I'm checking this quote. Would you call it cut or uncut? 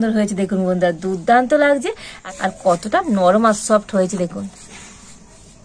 cut